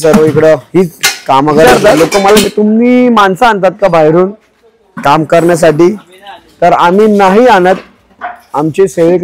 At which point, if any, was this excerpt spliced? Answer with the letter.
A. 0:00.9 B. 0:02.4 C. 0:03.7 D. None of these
B